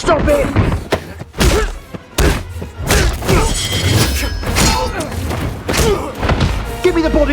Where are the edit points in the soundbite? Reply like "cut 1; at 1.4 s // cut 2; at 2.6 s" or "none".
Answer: cut 1; at 3.1 s